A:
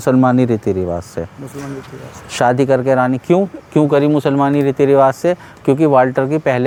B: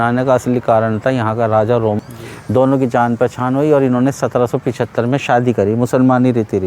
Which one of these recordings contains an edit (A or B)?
B